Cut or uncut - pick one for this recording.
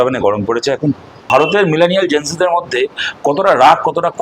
cut